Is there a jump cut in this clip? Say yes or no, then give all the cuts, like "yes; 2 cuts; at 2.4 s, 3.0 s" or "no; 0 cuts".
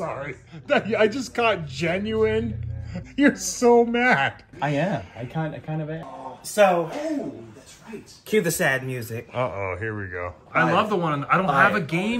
yes; 2 cuts; at 6.1 s, 10.4 s